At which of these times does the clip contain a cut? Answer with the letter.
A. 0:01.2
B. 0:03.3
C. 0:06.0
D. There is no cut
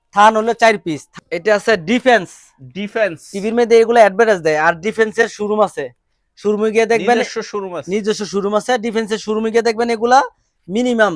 A